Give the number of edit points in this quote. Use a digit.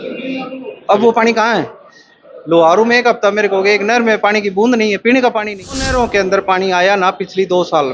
1